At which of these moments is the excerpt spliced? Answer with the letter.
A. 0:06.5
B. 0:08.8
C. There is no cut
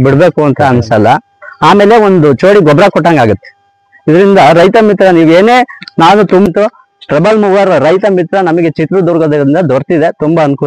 A